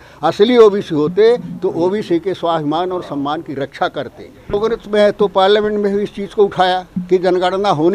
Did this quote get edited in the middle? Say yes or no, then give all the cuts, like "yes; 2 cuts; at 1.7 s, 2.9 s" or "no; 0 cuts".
yes; 1 cut; at 4.5 s